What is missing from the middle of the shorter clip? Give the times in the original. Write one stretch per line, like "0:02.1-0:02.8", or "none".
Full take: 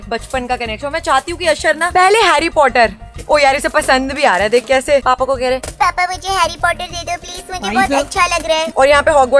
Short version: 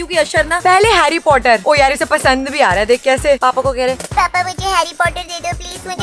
0:02.9-0:03.2